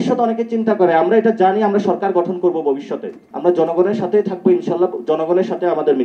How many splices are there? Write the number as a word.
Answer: one